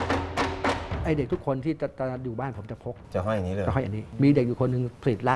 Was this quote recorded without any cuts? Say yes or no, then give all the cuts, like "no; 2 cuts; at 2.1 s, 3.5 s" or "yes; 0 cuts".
no; 3 cuts; at 0.9 s, 3.0 s, 4.1 s